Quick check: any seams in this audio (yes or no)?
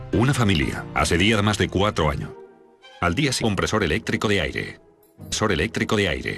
no